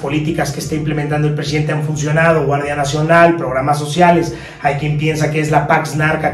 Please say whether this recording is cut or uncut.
uncut